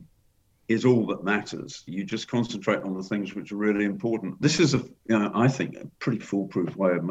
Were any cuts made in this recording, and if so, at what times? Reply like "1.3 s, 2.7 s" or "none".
1.8 s, 4.4 s